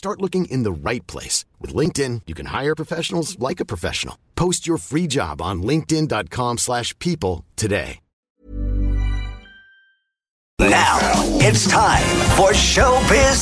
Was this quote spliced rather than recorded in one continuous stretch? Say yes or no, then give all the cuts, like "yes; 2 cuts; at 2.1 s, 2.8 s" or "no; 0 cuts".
yes; 1 cut; at 10.5 s